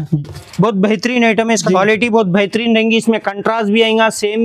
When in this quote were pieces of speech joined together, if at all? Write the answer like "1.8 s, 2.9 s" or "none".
1.6 s

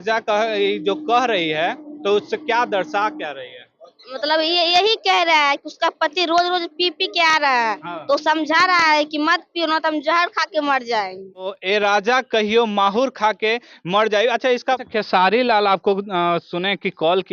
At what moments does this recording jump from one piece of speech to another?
11.5 s, 14.8 s

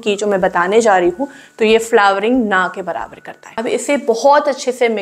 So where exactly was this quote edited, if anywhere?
3.5 s

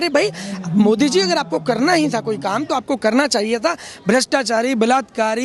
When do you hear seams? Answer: none

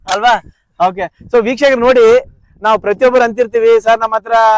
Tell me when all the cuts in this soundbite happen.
none

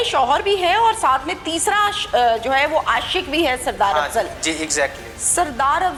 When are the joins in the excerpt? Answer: none

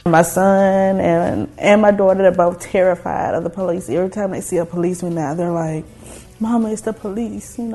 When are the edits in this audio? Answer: none

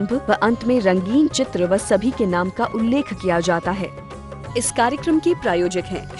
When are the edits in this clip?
3.9 s

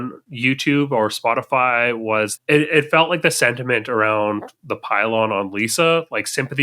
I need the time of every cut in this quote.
2.3 s

